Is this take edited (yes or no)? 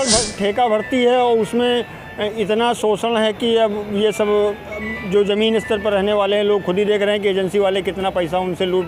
no